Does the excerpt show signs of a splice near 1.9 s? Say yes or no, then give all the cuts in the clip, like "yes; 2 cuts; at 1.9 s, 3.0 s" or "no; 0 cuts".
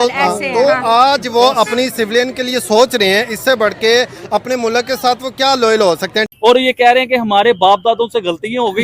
no; 1 cut; at 6.3 s